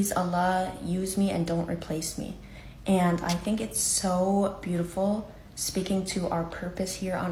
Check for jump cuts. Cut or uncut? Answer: uncut